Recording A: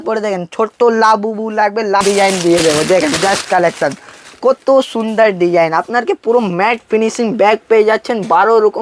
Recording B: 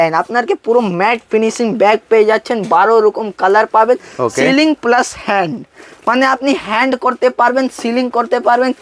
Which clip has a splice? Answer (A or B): A